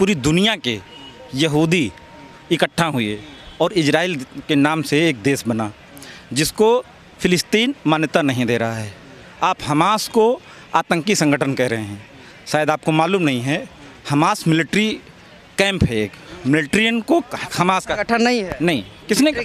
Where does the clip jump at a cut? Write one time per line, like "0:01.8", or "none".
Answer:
0:16.3